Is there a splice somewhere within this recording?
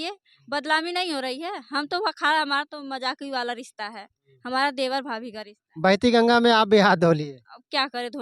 no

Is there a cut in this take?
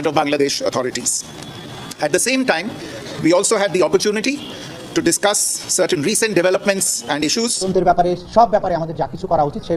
yes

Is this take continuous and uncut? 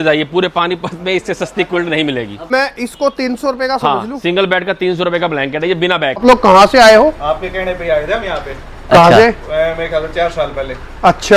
no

